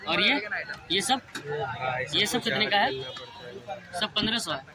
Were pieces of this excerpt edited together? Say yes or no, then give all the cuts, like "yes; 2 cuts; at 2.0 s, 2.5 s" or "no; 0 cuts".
no; 0 cuts